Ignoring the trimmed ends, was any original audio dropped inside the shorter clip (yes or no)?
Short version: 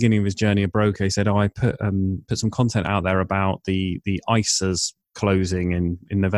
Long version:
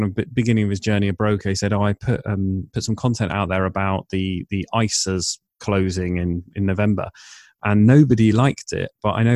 no